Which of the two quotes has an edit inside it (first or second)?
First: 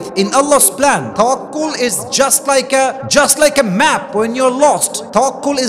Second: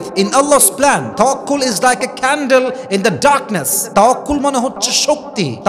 second